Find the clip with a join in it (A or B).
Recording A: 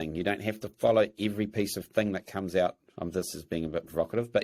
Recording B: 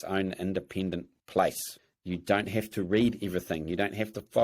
B